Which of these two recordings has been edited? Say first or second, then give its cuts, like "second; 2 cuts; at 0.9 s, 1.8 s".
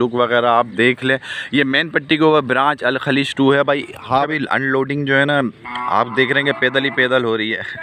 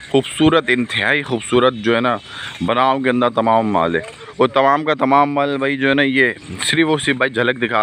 first; 1 cut; at 4.3 s